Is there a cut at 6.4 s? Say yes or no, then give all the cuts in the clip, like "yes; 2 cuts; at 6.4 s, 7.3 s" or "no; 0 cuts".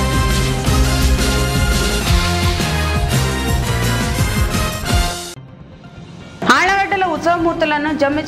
no; 0 cuts